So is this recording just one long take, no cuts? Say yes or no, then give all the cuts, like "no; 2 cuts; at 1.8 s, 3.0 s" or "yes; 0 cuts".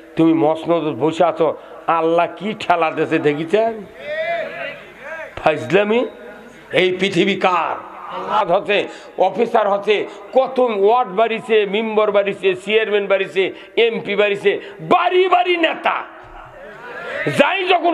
no; 1 cut; at 8.4 s